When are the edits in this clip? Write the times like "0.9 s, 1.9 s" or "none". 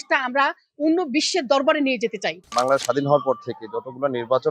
2.4 s